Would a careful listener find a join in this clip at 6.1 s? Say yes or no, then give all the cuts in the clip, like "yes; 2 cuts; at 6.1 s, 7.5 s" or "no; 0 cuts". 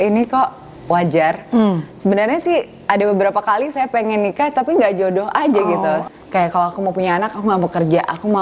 yes; 1 cut; at 6.1 s